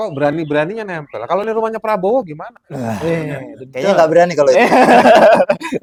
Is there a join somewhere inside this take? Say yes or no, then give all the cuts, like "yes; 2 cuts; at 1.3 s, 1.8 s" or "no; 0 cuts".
no; 0 cuts